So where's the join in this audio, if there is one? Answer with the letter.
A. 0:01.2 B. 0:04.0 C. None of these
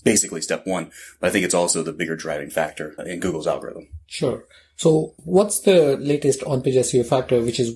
C